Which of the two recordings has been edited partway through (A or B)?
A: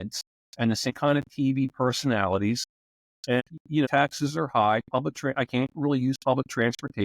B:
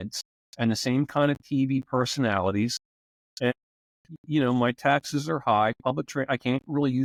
A